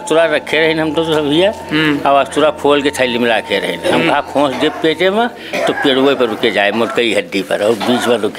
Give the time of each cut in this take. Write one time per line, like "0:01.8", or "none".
none